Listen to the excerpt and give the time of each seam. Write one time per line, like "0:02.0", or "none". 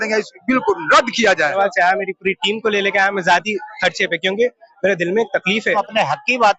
0:01.5
0:05.7